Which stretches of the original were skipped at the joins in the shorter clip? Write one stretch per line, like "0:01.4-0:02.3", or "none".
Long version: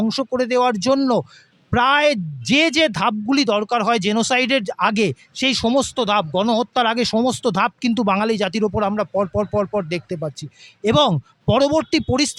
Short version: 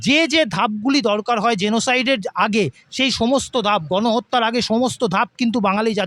none